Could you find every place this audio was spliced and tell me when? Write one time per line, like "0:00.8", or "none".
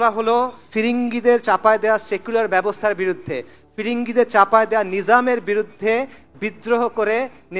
none